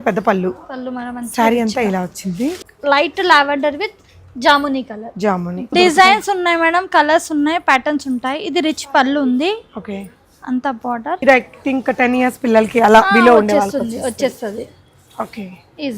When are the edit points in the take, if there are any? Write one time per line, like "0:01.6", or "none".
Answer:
0:02.6
0:05.7
0:11.2